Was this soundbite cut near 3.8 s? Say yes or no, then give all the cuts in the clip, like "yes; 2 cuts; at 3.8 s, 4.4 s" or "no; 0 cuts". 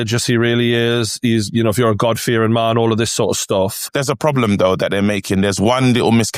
yes; 1 cut; at 3.8 s